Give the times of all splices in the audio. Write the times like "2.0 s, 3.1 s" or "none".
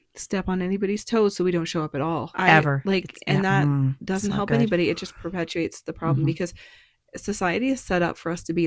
2.3 s

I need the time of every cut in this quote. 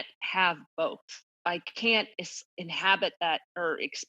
1.4 s

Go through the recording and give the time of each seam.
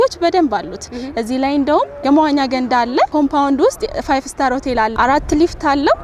2.0 s, 3.1 s, 4.9 s

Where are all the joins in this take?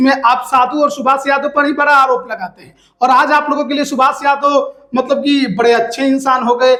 none

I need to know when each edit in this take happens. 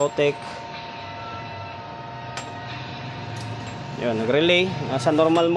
none

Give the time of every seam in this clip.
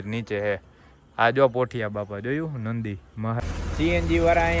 3.4 s

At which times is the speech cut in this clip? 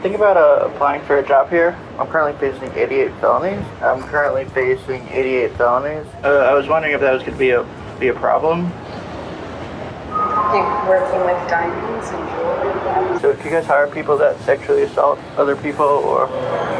6.1 s, 13.2 s

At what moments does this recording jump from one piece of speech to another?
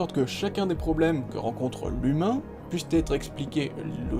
none

